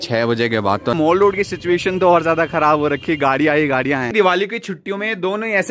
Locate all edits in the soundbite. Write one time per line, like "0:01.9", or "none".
0:00.9
0:04.1